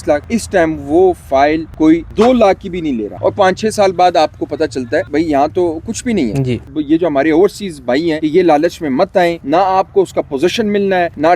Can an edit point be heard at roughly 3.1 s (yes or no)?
yes